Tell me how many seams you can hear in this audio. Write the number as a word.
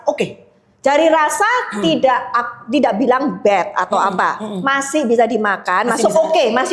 zero